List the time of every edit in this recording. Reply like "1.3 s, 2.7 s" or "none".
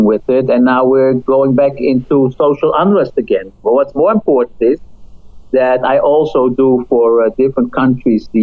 none